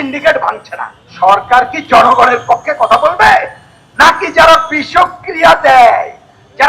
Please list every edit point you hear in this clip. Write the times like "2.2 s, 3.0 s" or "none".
1.1 s